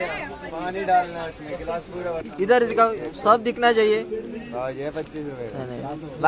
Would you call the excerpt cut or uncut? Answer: cut